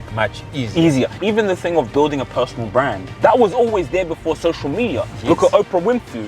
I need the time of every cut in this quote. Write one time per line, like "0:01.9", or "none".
0:01.2
0:03.0

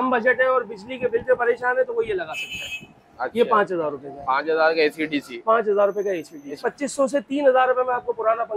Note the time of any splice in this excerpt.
0:06.6

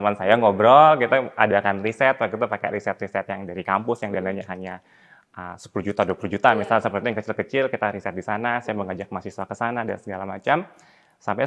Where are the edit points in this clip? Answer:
none

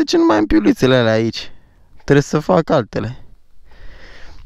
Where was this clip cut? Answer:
none

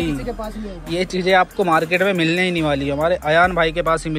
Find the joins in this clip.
none

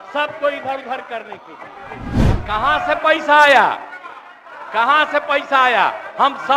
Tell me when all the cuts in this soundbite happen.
0:02.2

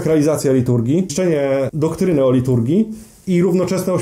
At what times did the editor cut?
0:01.5

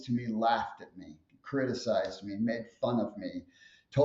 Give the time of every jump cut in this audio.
none

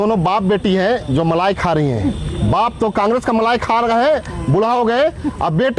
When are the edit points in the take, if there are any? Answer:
none

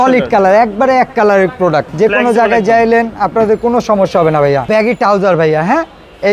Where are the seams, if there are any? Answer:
0:01.9
0:04.7

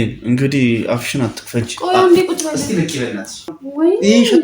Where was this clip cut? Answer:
0:03.5

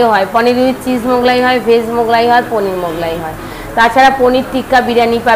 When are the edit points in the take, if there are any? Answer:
none

